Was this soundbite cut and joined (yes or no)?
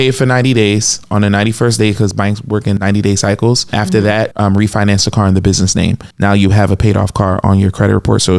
yes